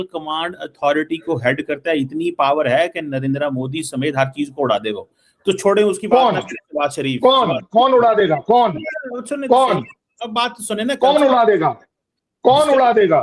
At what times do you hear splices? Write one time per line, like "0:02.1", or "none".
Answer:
none